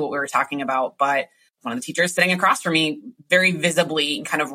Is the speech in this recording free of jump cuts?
no; 1 cut; at 1.5 s

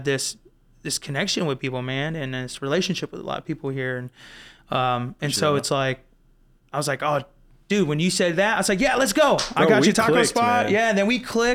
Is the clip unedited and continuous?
yes; 0 cuts

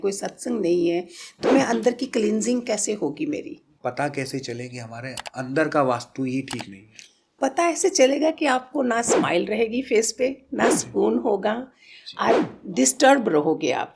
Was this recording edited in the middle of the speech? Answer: yes; 1 cut; at 3.7 s

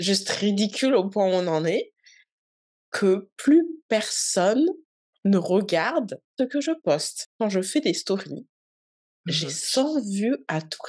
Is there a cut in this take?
yes; 2 cuts; at 6.3 s, 7.2 s

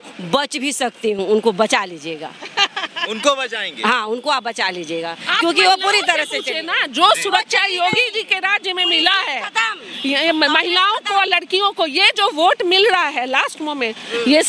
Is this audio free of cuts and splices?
yes; 0 cuts

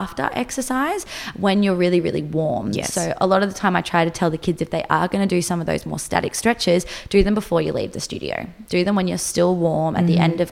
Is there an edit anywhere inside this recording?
no; 0 cuts

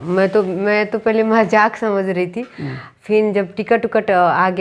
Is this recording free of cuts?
yes; 0 cuts

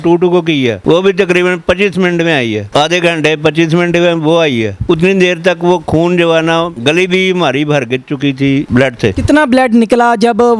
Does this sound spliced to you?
no; 0 cuts

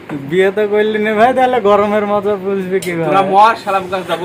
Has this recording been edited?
no; 0 cuts

